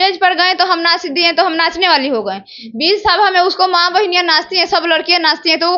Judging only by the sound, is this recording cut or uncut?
uncut